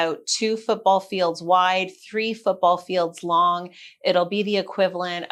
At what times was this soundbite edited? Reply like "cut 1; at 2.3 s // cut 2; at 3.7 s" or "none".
none